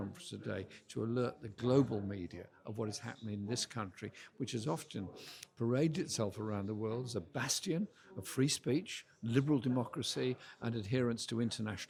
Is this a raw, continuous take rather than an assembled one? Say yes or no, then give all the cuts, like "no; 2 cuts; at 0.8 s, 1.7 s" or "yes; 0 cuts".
yes; 0 cuts